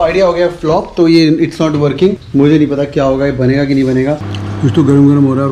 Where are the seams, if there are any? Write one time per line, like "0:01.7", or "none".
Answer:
0:02.2
0:04.2